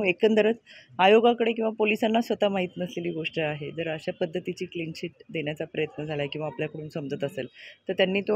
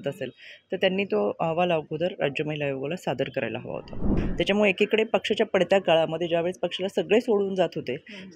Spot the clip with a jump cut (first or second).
second